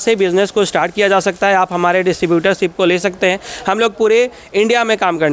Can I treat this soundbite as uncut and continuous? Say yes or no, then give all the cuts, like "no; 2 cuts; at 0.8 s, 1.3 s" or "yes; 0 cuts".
yes; 0 cuts